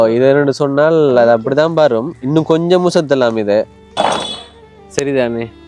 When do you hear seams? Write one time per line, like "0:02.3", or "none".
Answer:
0:03.8